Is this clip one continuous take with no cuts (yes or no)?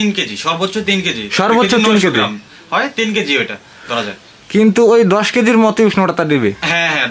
yes